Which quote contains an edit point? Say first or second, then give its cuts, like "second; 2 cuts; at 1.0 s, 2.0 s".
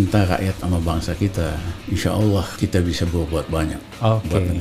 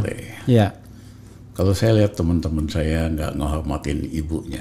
first; 2 cuts; at 1.7 s, 2.5 s